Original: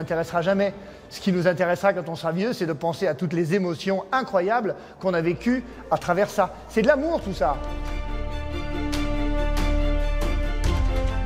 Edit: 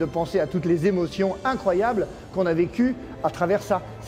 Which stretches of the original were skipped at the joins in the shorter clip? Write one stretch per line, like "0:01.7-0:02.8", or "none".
none